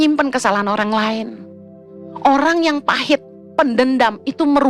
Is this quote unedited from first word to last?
yes; 0 cuts

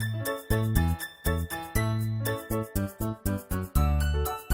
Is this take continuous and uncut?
no; 1 cut; at 1.7 s

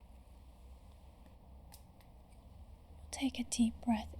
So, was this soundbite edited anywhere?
yes; 1 cut; at 1.4 s

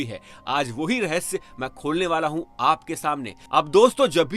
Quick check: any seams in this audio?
no; 0 cuts

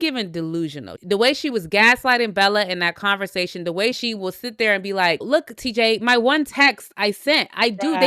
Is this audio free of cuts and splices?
no; 3 cuts; at 0.9 s, 4.0 s, 5.2 s

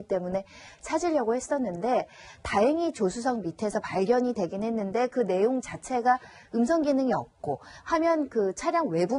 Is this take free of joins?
no; 1 cut; at 4.0 s

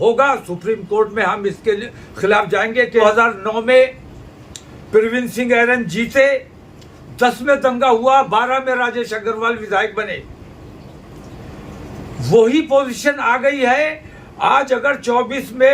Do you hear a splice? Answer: yes; 1 cut; at 3.0 s

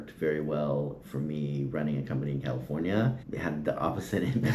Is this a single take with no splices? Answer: no; 1 cut; at 3.2 s

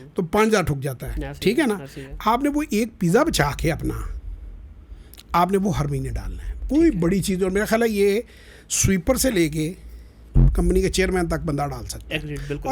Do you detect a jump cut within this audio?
no; 0 cuts

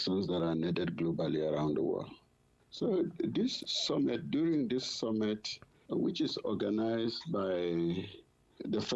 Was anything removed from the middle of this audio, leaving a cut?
no; 0 cuts

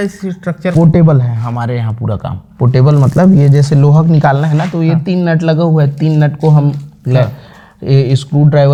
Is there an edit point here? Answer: no; 0 cuts

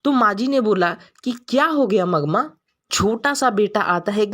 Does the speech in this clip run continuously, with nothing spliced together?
no; 1 cut; at 2.9 s

